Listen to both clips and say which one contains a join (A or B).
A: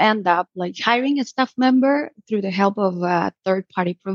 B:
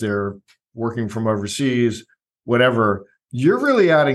B